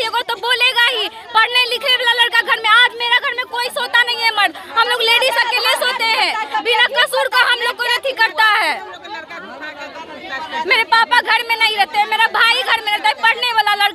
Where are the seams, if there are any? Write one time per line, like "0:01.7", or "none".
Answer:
none